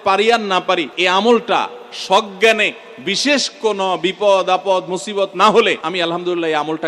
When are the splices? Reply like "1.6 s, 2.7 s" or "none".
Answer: 0.9 s, 5.8 s